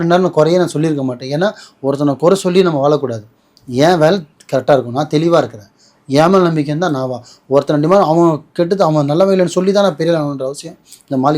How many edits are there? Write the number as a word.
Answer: zero